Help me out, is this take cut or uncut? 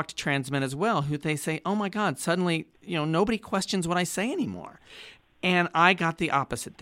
cut